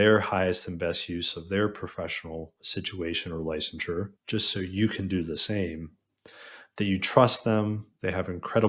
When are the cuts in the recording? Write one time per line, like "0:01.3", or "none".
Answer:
0:02.6
0:04.2

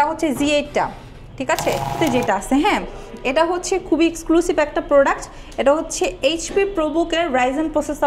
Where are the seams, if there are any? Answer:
0:01.9

